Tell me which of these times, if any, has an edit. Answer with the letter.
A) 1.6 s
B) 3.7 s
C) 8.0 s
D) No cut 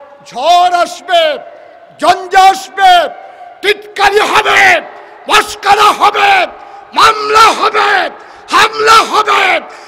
D